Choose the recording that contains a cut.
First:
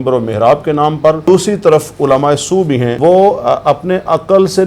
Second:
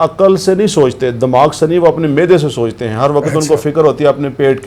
first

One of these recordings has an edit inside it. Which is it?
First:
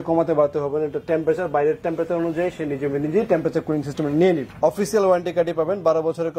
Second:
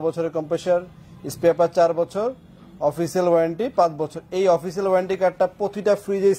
first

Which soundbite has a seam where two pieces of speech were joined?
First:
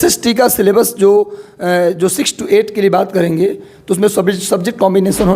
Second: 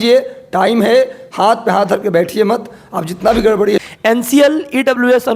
second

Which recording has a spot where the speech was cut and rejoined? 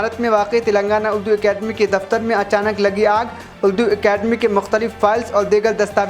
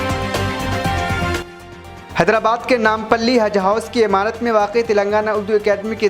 second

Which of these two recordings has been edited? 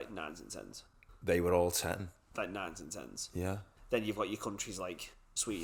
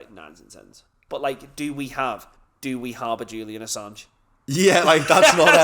second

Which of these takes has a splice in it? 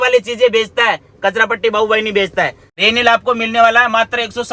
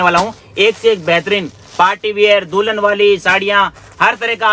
first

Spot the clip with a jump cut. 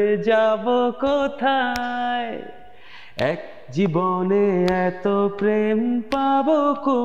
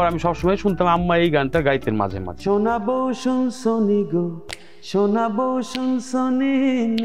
second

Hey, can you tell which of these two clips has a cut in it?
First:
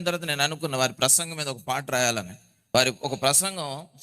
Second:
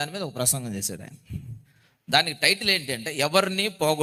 first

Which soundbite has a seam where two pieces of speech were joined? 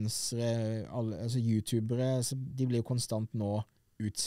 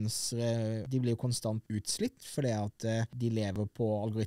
second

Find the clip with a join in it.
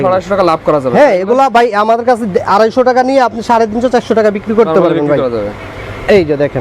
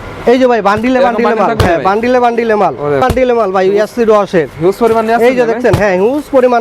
second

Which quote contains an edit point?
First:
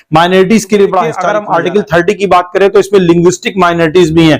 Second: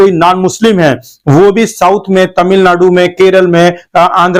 first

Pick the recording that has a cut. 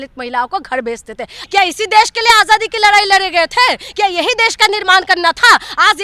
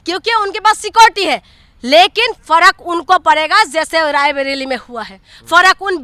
first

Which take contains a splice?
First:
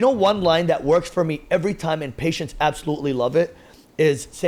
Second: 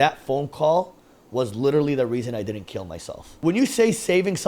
second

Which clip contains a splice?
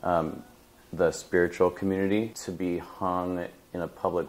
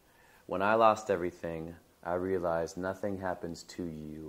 first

